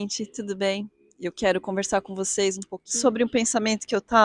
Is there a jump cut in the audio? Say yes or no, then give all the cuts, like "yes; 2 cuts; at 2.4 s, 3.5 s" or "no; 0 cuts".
yes; 2 cuts; at 1.0 s, 2.7 s